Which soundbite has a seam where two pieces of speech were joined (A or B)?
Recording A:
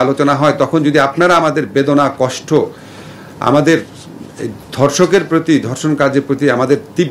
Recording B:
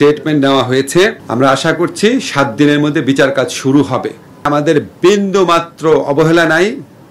B